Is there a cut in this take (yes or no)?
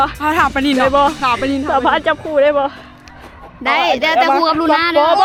no